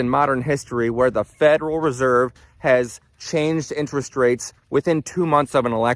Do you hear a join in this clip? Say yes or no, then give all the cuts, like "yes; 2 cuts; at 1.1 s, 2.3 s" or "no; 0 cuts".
no; 0 cuts